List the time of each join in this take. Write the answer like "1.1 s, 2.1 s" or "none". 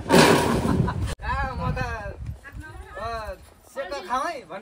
1.0 s